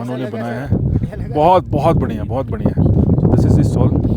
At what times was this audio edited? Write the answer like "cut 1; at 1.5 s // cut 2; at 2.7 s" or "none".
none